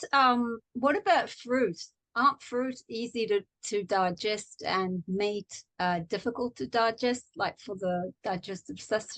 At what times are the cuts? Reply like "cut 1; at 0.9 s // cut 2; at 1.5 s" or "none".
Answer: cut 1; at 5.6 s